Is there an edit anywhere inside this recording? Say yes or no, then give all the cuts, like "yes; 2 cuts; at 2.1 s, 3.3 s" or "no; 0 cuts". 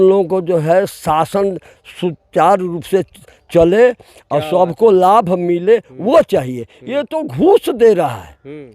no; 0 cuts